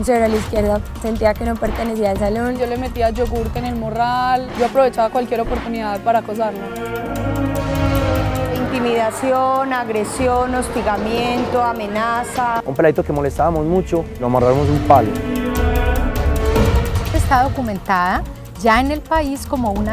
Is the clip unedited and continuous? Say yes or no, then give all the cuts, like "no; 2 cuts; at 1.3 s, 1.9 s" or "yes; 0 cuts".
no; 1 cut; at 6.1 s